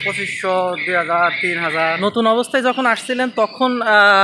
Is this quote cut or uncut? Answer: cut